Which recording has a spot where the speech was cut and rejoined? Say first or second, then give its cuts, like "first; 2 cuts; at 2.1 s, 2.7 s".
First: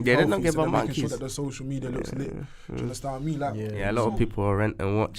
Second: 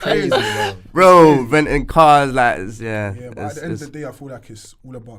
first; 1 cut; at 3.8 s